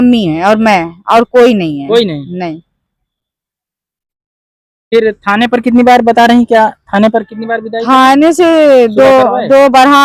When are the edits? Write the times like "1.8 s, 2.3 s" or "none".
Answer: none